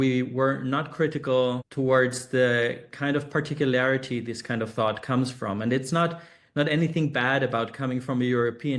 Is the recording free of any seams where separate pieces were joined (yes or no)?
no